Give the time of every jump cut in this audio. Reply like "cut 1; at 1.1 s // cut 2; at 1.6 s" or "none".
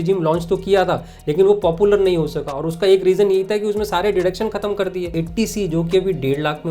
cut 1; at 5.1 s